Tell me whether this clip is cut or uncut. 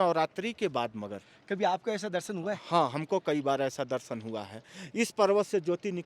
uncut